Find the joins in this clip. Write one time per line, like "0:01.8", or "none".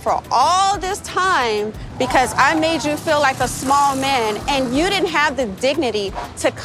none